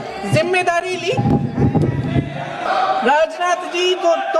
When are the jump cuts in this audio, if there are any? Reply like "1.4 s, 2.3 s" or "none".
2.6 s